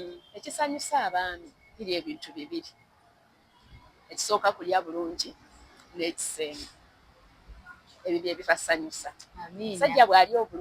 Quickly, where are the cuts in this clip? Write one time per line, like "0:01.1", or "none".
none

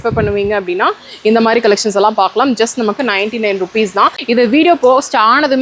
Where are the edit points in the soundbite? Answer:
0:04.2

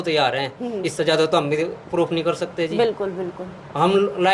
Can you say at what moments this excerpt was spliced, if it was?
none

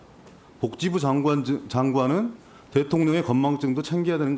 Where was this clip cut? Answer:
none

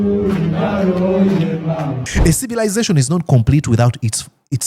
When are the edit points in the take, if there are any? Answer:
0:02.0

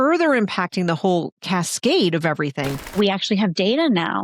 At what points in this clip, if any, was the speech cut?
0:02.9

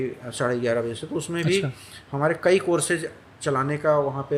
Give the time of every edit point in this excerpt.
none

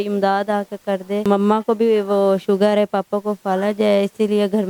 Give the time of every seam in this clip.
0:01.2

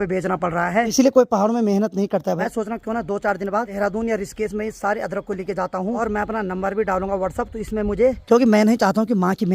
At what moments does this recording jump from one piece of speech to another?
0:00.9
0:02.4
0:03.7
0:06.0
0:08.2

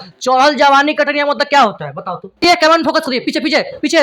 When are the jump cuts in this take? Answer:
0:02.4

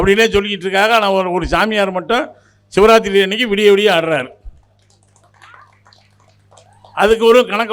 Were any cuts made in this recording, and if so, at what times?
none

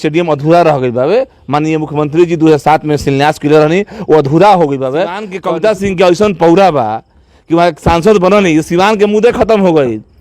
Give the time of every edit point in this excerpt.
0:05.3

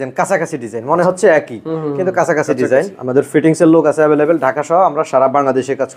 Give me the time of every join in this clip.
0:03.0

